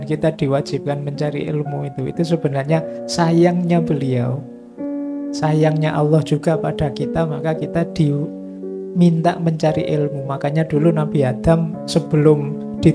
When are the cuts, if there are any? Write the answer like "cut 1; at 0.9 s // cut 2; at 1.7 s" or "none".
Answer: none